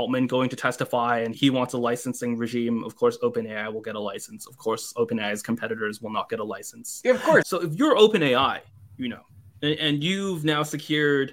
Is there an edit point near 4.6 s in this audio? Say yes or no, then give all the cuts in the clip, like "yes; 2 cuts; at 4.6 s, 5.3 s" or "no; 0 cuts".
no; 2 cuts; at 1.3 s, 7.4 s